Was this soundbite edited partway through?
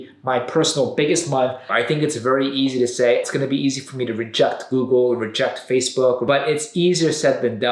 yes; 3 cuts; at 1.7 s, 3.2 s, 6.2 s

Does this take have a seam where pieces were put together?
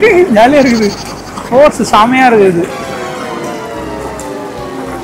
yes; 1 cut; at 1.4 s

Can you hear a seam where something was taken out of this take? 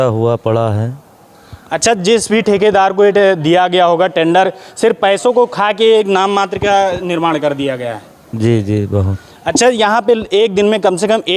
no; 0 cuts

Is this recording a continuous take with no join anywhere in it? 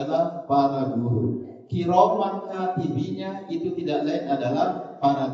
yes; 0 cuts

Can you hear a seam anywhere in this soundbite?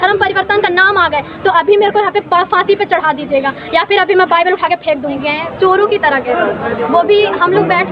yes; 1 cut; at 5.2 s

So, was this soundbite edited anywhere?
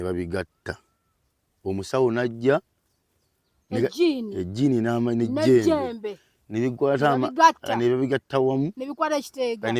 no; 0 cuts

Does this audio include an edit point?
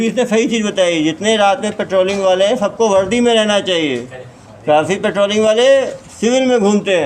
no; 0 cuts

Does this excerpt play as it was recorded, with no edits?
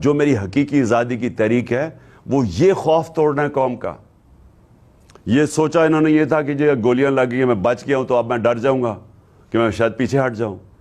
yes; 0 cuts

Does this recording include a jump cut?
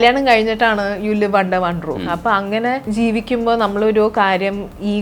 yes; 2 cuts; at 2.0 s, 2.8 s

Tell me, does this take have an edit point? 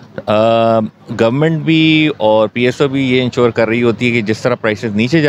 no; 0 cuts

